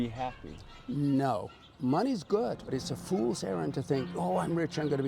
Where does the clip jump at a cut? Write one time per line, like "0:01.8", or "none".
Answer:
0:02.7